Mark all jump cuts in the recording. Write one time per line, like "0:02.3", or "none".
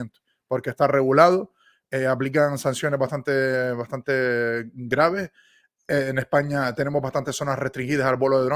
none